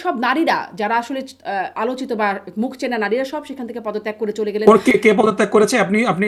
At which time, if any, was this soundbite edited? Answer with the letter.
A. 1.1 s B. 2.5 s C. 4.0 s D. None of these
D